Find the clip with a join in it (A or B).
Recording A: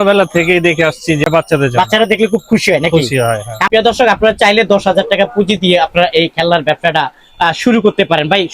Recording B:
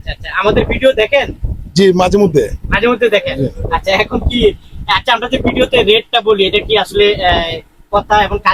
A